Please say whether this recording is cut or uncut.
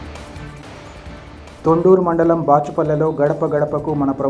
uncut